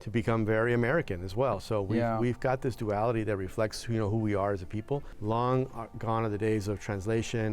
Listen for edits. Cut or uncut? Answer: cut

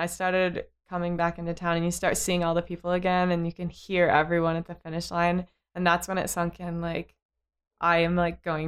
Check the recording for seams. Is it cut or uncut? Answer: uncut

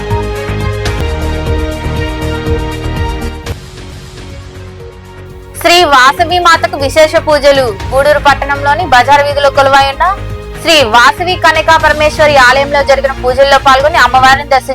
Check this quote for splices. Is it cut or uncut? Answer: cut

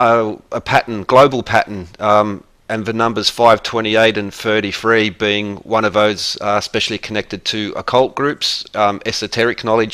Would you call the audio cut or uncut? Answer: cut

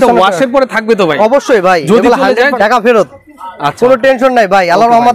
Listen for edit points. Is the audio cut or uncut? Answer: cut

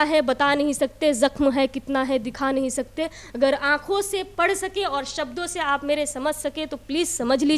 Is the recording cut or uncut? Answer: uncut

